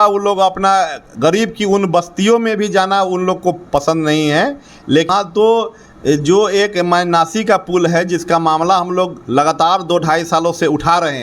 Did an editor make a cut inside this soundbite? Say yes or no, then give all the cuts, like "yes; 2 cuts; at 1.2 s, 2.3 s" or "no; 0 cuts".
yes; 1 cut; at 5.1 s